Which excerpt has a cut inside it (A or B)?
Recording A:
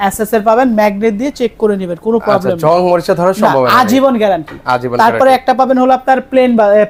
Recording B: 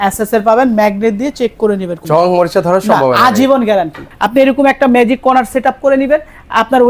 B